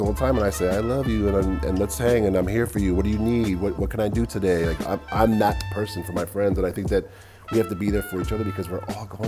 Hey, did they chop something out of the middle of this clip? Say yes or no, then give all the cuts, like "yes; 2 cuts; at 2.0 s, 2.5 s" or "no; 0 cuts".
no; 0 cuts